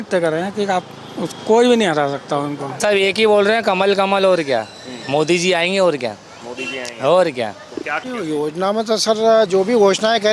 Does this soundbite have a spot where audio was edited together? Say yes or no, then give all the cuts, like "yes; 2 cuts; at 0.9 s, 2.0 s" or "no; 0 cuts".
yes; 2 cuts; at 2.8 s, 7.9 s